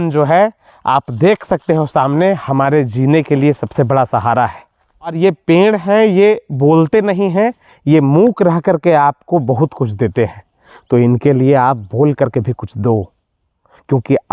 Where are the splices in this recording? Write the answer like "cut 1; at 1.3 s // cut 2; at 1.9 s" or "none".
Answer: cut 1; at 5.1 s